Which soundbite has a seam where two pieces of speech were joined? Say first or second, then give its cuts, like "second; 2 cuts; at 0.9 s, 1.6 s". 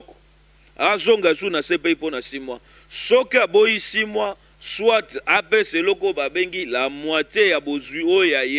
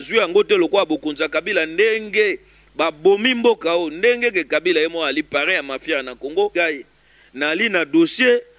second; 1 cut; at 6.5 s